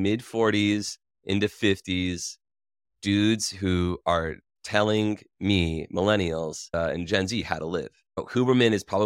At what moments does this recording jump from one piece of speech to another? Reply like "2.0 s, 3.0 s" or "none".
none